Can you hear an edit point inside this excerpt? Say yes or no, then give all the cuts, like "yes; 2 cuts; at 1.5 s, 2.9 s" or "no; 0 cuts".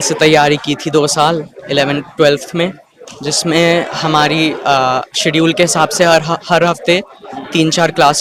no; 0 cuts